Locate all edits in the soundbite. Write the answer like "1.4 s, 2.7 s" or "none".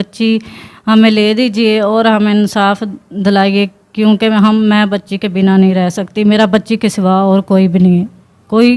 none